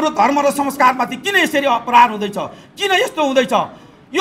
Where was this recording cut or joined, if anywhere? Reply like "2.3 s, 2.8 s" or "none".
none